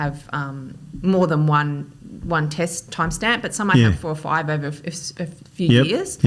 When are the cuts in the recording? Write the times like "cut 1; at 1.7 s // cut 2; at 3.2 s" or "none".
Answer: none